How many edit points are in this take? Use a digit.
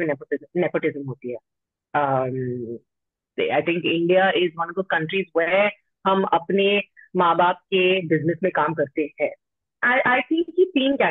1